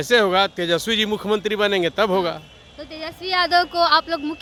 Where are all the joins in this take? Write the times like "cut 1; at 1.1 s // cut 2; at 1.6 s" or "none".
none